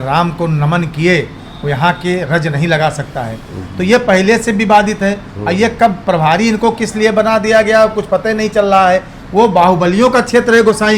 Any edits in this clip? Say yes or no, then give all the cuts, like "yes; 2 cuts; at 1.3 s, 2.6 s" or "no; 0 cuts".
no; 0 cuts